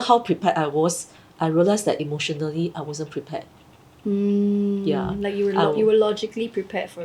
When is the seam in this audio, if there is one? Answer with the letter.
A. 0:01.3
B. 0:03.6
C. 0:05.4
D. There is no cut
D